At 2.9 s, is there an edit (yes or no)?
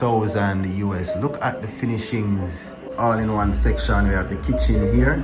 yes